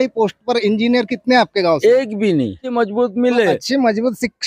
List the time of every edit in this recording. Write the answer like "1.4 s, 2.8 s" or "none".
2.7 s